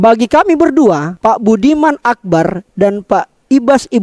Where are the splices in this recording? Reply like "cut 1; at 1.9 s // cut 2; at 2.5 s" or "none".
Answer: cut 1; at 1.1 s

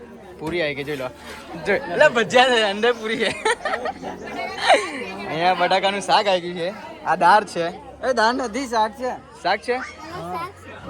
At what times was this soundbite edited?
none

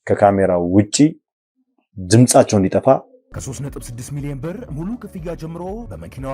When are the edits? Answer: cut 1; at 3.3 s

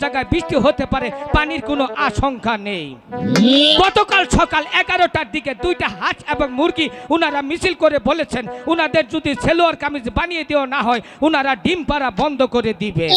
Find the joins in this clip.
none

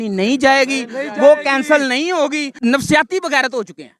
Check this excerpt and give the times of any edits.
cut 1; at 2.5 s

